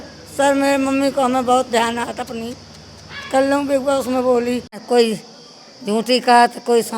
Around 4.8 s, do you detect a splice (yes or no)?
yes